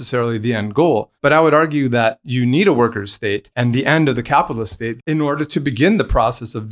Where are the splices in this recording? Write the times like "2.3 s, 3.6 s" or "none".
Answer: 1.1 s, 3.5 s, 5.0 s